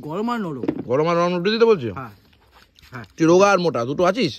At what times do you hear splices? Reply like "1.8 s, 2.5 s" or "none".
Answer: none